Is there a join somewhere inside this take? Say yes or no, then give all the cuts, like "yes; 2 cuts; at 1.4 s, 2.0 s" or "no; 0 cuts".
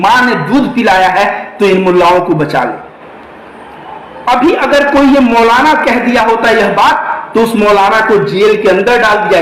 no; 0 cuts